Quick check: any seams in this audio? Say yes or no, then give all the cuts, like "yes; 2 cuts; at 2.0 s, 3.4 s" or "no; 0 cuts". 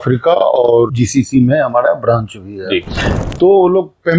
yes; 2 cuts; at 0.9 s, 3.1 s